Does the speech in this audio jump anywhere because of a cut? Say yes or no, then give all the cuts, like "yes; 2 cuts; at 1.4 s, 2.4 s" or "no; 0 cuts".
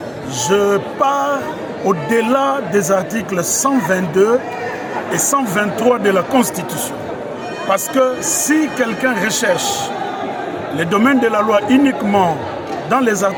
no; 0 cuts